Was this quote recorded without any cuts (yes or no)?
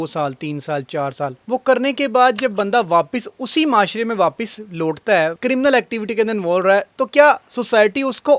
no